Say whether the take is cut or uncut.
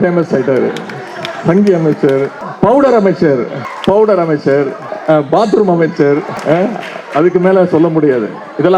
cut